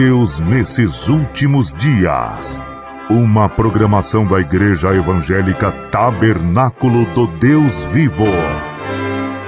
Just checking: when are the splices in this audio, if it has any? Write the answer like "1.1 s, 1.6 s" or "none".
8.5 s